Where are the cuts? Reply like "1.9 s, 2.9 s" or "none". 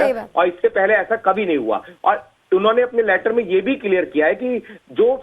1.9 s